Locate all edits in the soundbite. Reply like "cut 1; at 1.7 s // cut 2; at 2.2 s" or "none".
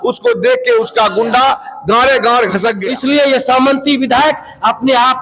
cut 1; at 2.8 s